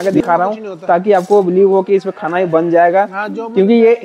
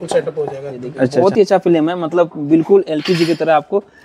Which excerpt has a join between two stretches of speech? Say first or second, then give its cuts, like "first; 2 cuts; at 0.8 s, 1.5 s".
second; 1 cut; at 1.2 s